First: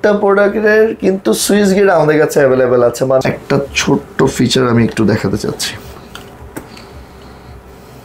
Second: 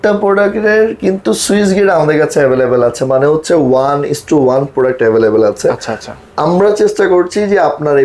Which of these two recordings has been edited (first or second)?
first